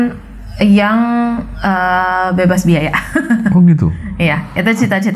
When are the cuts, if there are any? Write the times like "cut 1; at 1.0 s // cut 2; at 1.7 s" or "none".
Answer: none